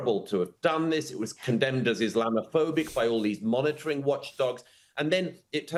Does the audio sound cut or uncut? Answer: uncut